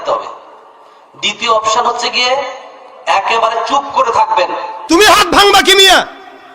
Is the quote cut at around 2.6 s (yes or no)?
no